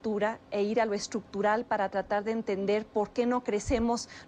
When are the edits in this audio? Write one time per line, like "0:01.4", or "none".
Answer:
0:02.3